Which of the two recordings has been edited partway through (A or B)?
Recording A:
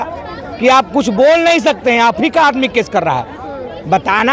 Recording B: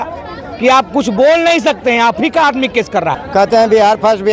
B